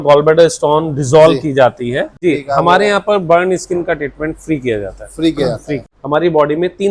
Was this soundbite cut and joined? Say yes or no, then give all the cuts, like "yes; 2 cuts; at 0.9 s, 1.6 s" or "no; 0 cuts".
yes; 2 cuts; at 2.1 s, 5.9 s